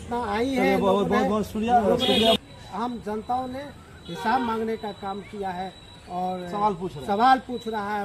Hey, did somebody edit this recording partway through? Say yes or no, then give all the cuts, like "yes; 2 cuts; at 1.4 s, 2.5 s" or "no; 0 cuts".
yes; 1 cut; at 2.4 s